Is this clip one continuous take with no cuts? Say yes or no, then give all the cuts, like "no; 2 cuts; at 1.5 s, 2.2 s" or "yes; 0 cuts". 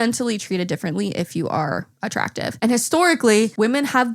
no; 1 cut; at 2.6 s